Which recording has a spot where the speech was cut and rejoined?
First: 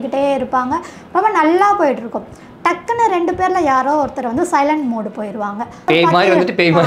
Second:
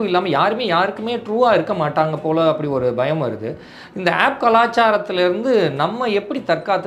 first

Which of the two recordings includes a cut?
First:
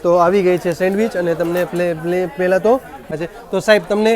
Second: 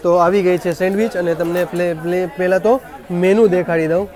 first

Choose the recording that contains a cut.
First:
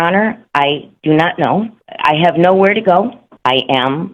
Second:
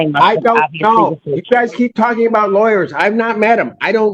first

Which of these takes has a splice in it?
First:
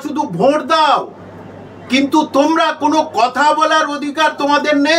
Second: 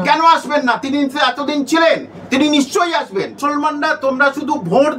second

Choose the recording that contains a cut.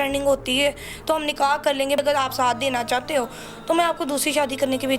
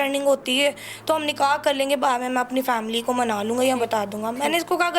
first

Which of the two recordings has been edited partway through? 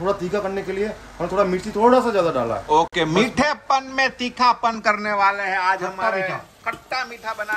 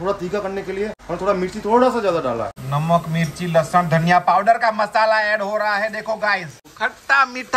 second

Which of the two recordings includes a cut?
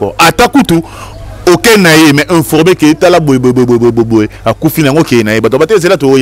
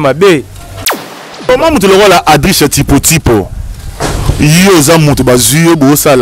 second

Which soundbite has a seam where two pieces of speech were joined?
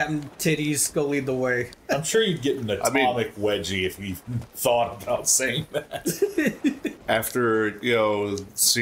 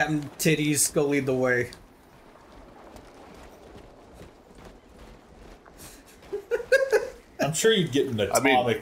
first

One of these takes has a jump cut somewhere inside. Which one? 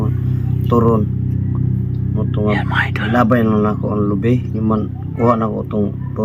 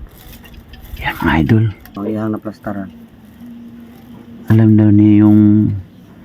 second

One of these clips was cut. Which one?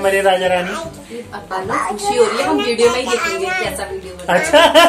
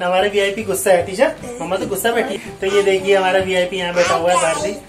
second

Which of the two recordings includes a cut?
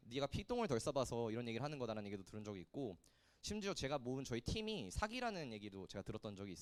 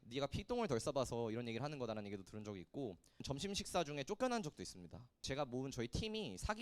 second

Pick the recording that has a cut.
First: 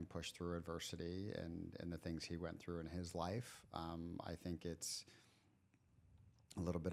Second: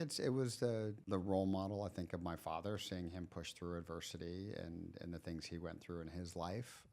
second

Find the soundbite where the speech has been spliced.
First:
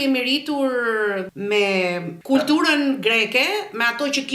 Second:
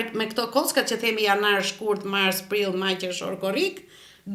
first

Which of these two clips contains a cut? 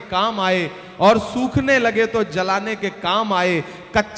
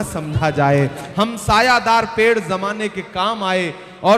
second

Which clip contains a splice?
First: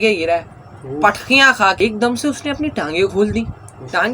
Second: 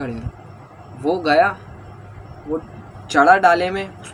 first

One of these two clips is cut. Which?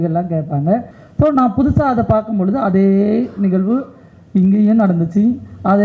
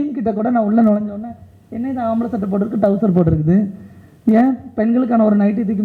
first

